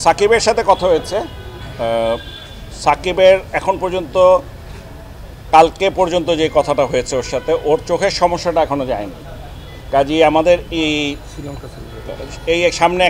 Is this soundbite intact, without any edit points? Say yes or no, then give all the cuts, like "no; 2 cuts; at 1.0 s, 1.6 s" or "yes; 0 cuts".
yes; 0 cuts